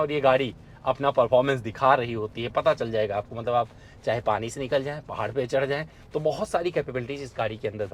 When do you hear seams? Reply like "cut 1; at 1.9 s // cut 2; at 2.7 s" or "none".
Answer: none